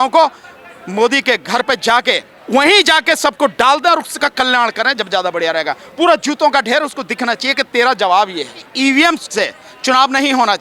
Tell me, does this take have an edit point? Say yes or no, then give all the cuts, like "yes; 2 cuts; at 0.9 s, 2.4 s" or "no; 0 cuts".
yes; 2 cuts; at 2.3 s, 8.6 s